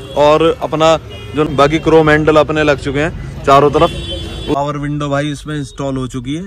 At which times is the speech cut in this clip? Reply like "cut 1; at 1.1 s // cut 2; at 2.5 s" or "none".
cut 1; at 1.5 s // cut 2; at 4.5 s